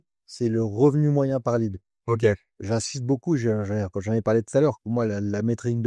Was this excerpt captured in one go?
yes; 0 cuts

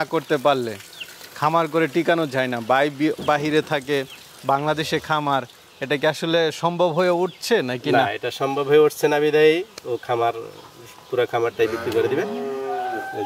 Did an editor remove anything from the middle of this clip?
no; 0 cuts

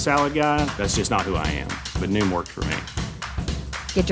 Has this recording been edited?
no; 0 cuts

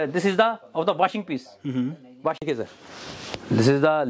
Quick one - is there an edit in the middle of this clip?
yes; 1 cut; at 2.5 s

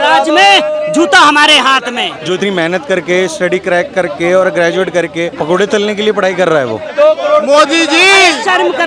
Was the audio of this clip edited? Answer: yes; 3 cuts; at 2.1 s, 5.3 s, 6.9 s

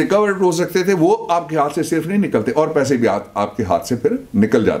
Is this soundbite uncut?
yes; 0 cuts

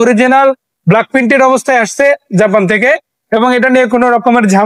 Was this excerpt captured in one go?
yes; 0 cuts

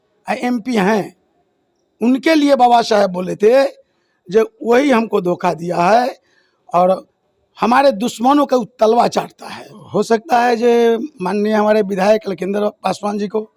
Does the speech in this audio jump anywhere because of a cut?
yes; 1 cut; at 9.8 s

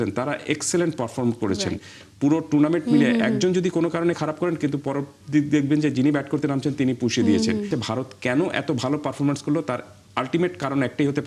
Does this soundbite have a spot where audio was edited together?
yes; 1 cut; at 7.7 s

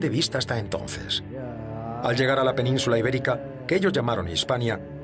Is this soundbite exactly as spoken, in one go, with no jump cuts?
yes; 0 cuts

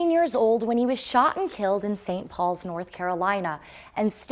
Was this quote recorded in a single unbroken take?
yes; 0 cuts

